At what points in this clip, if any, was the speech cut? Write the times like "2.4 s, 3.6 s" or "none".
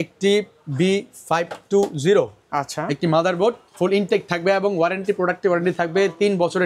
none